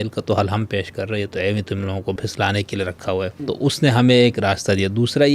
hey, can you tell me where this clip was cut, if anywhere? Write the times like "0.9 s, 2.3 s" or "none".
2.2 s, 3.4 s